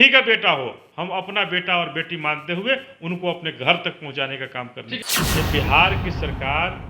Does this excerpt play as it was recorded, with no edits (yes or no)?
no